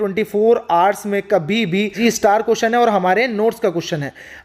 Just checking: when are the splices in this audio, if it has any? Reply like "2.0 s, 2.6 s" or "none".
1.9 s